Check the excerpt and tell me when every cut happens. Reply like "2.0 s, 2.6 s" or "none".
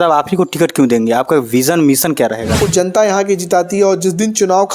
2.6 s